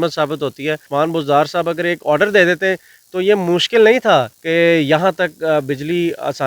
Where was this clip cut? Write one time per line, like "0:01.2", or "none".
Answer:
0:00.9
0:04.4

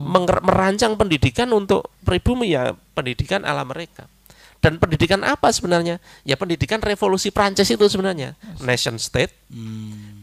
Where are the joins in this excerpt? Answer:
none

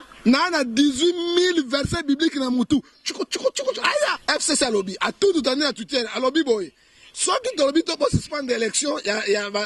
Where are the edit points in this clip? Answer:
0:04.2

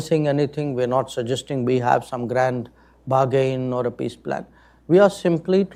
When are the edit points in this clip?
none

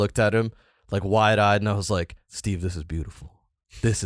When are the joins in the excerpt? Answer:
0:02.2

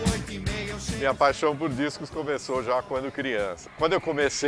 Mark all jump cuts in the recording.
0:00.9
0:03.6

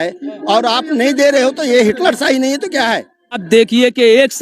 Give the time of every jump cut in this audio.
0:03.4

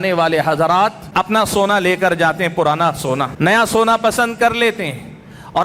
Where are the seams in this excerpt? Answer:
0:01.0
0:03.3

